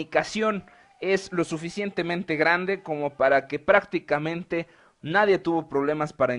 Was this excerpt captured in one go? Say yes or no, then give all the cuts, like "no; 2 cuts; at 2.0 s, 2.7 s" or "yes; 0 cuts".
no; 1 cut; at 4.1 s